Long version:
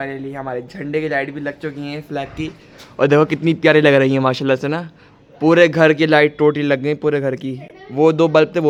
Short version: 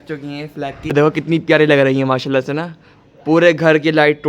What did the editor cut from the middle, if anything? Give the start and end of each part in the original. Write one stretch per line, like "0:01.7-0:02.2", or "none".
0:02.4-0:03.1